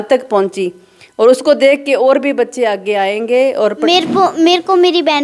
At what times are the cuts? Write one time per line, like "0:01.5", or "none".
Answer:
0:03.8

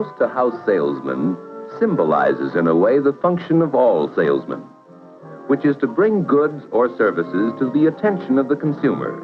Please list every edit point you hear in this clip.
0:03.4

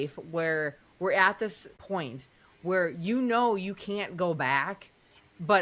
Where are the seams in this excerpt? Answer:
0:01.8

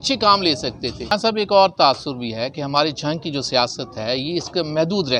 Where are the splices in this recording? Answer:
0:01.0

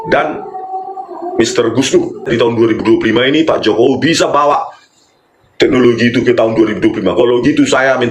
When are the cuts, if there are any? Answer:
0:02.3

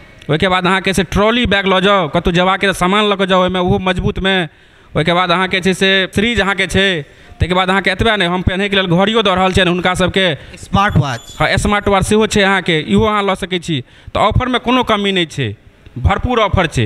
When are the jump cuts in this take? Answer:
0:06.1

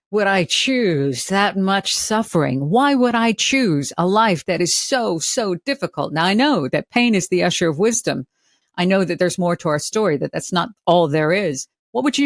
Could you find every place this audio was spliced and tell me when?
0:08.5

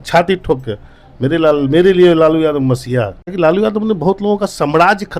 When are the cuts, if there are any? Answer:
0:03.2

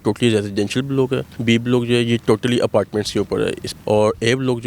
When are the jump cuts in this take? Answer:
0:01.3
0:03.7

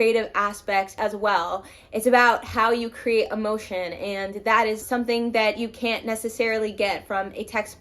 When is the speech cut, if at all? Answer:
0:04.8

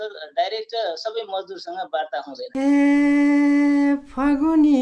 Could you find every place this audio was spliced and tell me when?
0:02.5

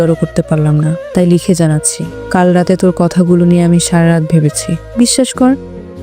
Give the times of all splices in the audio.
0:04.8

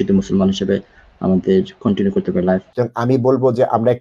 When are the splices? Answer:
0:02.7

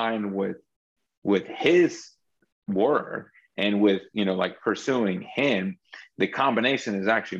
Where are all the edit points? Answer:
none

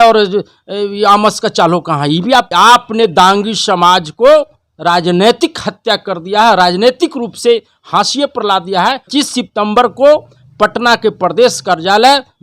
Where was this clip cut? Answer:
0:02.5
0:09.0

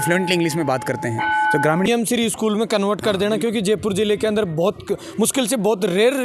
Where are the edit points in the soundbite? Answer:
0:01.9

